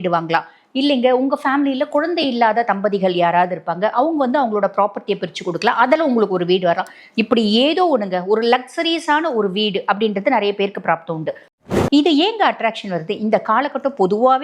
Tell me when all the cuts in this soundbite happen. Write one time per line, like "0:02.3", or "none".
0:11.7